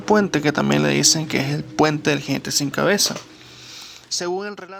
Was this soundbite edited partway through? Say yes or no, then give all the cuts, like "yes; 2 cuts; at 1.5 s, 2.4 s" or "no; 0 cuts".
no; 0 cuts